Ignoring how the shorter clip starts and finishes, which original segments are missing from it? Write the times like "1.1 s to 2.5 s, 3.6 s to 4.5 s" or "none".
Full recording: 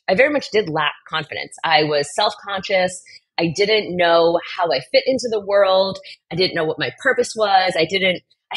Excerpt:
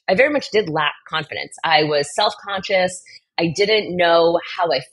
none